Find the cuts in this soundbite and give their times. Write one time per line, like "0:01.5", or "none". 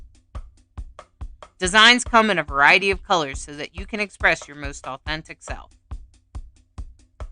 0:01.5